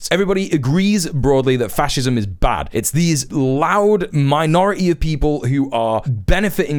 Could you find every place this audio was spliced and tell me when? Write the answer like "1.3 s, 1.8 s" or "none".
none